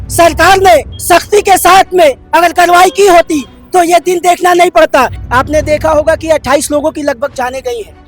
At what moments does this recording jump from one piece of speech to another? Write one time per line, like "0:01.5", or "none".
0:00.9
0:05.2